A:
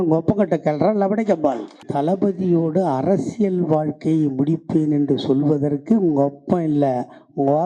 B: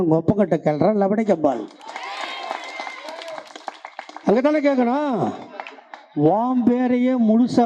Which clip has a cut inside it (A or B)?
A